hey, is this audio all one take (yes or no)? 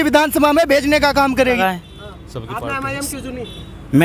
no